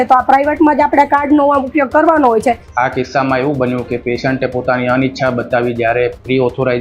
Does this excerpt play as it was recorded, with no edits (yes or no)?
no